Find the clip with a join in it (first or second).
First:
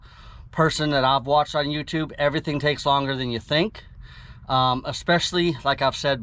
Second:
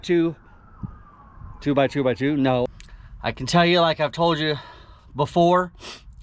second